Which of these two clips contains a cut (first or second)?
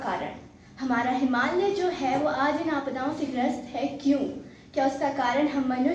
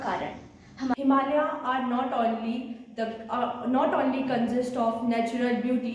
second